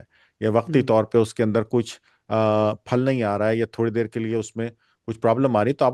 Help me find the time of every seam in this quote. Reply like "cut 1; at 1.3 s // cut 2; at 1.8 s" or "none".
none